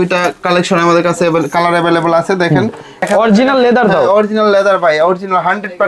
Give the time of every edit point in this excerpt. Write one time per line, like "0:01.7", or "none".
0:03.0

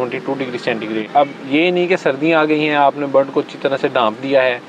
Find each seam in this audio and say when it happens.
0:01.1

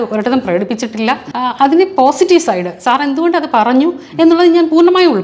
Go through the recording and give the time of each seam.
0:01.3

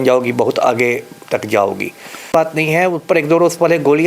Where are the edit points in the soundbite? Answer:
0:02.2

